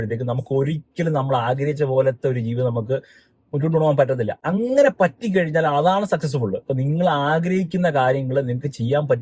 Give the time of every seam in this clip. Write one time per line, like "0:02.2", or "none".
none